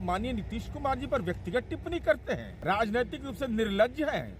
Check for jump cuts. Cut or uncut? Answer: cut